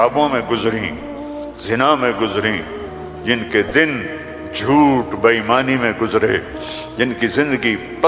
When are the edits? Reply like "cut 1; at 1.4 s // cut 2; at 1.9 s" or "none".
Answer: none

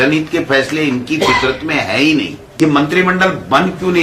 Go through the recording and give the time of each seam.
cut 1; at 2.6 s

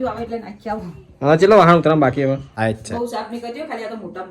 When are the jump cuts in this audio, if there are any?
cut 1; at 2.6 s

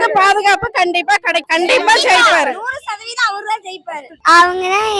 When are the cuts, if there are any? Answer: cut 1; at 1.5 s // cut 2; at 4.1 s

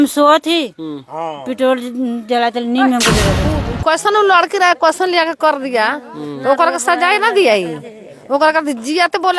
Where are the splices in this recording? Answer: cut 1; at 3.4 s

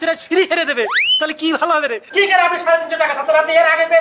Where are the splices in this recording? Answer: cut 1; at 2.0 s

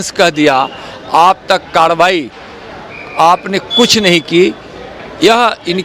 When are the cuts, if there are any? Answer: none

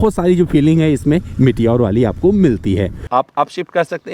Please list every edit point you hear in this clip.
cut 1; at 3.0 s

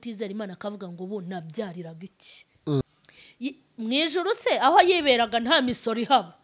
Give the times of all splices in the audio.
cut 1; at 2.8 s

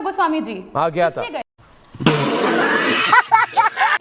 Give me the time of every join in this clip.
none

